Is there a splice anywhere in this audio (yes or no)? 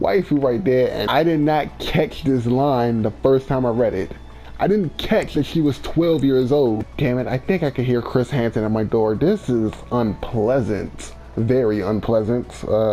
yes